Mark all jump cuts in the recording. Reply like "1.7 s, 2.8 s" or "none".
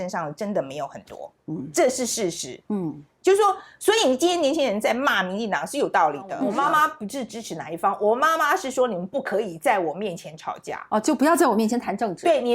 6.4 s